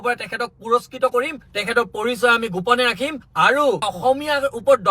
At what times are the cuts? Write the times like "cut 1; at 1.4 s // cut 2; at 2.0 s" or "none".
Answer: cut 1; at 1.5 s // cut 2; at 3.9 s